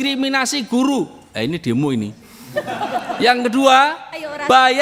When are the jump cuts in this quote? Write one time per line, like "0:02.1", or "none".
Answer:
none